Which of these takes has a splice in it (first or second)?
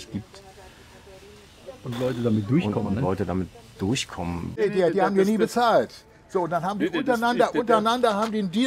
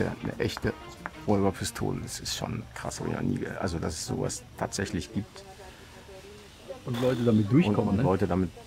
first